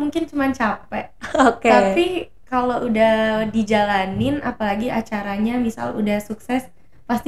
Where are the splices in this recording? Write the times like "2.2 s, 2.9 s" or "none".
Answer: none